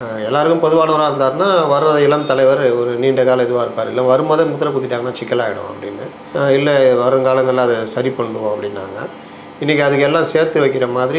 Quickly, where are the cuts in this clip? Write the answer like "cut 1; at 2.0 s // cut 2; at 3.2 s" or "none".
none